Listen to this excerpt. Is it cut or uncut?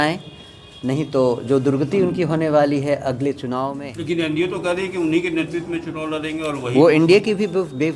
cut